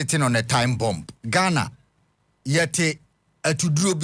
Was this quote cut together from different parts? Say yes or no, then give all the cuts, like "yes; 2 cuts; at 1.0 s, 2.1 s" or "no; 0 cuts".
yes; 1 cut; at 1.1 s